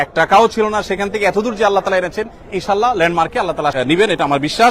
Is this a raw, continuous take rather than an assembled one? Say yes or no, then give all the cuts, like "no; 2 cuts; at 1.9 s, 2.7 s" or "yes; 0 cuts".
no; 1 cut; at 3.7 s